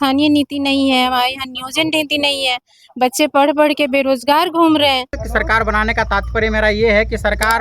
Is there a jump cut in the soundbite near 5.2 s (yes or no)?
yes